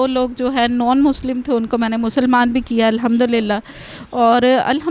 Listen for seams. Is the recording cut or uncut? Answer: uncut